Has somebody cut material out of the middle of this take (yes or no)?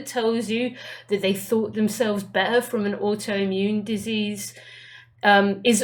no